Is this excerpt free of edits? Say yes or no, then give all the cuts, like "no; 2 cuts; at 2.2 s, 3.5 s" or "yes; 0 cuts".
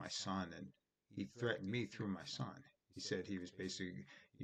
yes; 0 cuts